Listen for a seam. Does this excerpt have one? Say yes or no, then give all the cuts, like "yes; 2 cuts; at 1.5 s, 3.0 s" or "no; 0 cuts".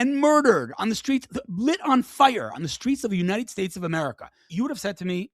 yes; 1 cut; at 4.2 s